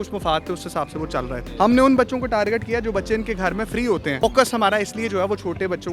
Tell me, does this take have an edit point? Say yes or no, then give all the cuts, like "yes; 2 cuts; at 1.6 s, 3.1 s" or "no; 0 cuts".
yes; 2 cuts; at 1.4 s, 4.2 s